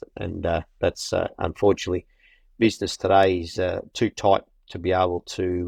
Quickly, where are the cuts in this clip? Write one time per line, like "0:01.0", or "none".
none